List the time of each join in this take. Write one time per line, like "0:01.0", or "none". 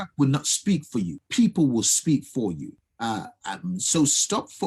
0:01.2
0:02.8